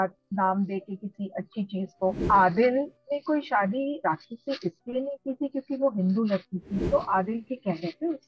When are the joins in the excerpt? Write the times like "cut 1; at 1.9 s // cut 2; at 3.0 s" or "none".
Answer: cut 1; at 2.2 s // cut 2; at 6.8 s